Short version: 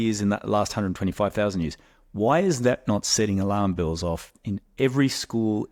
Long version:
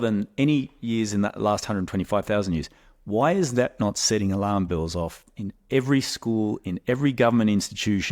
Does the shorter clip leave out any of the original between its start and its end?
no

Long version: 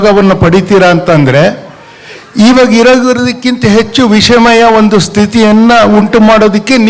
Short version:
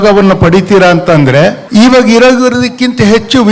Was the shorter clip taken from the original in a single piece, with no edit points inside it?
no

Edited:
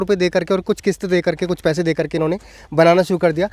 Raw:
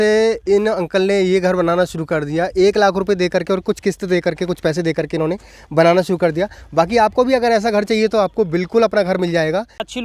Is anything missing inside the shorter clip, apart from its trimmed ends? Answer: no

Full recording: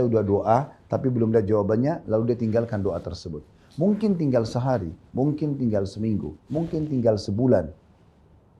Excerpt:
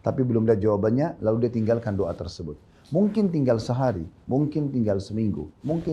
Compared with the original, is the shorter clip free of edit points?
yes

